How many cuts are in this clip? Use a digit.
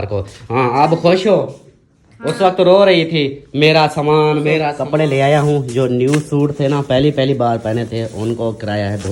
1